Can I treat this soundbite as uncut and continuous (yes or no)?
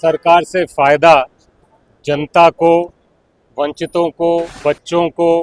no